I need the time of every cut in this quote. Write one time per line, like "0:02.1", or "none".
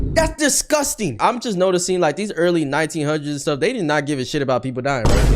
0:01.1